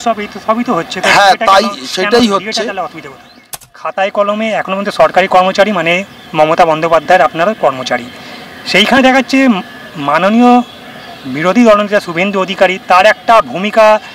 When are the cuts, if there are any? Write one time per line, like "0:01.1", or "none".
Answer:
0:03.8